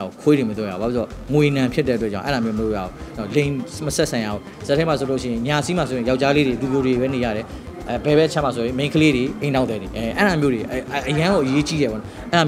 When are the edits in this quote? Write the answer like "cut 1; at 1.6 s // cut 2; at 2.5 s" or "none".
none